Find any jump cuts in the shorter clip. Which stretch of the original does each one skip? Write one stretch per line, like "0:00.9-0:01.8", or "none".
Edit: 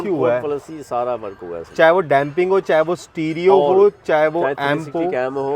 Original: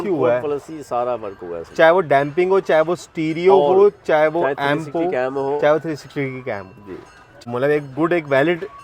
none